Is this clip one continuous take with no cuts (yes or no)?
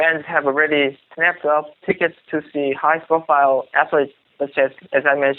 no